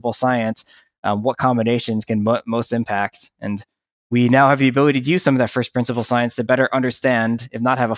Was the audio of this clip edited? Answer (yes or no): no